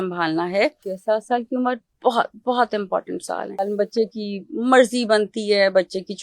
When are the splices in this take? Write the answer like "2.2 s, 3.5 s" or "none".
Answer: 0.9 s, 3.7 s